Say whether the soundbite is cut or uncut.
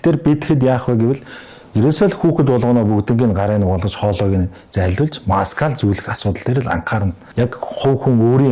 cut